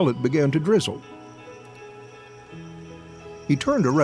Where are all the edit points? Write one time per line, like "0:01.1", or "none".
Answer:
0:01.0
0:03.0